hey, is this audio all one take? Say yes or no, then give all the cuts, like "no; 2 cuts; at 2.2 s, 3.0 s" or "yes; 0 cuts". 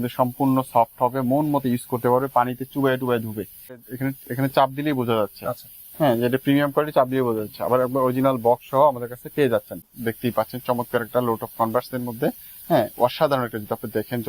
no; 2 cuts; at 3.8 s, 9.9 s